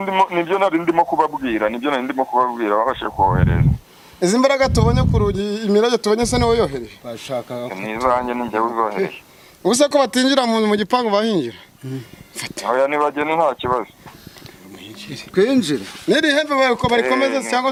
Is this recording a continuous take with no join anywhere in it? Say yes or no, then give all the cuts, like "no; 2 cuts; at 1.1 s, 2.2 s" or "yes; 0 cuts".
yes; 0 cuts